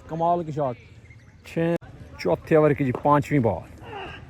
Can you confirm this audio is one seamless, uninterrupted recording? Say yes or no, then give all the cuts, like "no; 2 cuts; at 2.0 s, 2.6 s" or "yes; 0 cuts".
no; 1 cut; at 1.8 s